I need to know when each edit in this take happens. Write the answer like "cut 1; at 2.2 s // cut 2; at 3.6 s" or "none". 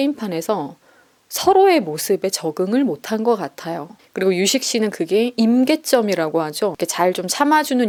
none